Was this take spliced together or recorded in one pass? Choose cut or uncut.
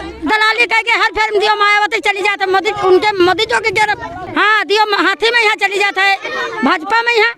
cut